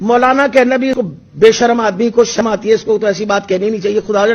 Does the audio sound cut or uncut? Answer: cut